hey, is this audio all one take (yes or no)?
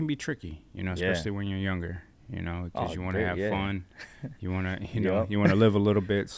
yes